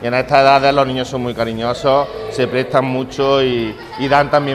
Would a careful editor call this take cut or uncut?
uncut